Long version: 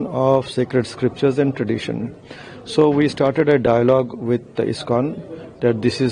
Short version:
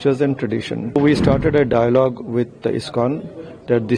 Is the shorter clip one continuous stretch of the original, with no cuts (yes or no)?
no